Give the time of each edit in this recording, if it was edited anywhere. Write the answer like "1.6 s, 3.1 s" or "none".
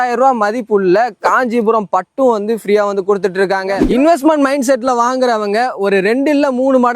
3.8 s